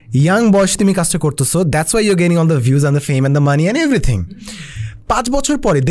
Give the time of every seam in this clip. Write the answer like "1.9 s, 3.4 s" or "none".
none